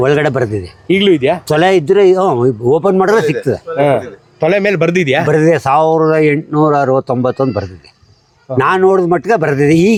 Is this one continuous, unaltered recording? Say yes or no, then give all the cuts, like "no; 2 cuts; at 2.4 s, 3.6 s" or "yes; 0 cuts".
yes; 0 cuts